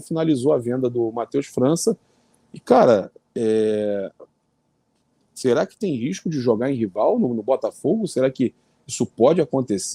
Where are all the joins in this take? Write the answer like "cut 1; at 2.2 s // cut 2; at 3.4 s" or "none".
none

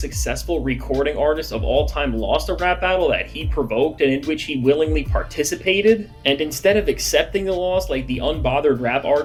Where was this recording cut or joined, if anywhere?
none

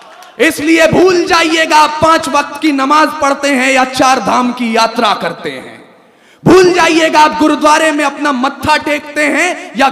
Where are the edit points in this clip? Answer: none

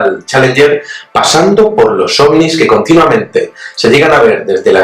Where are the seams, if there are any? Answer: cut 1; at 3.7 s

